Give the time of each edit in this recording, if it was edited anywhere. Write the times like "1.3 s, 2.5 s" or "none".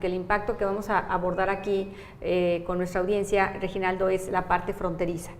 4.0 s